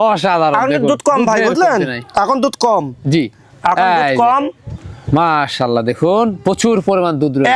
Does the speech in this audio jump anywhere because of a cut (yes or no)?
no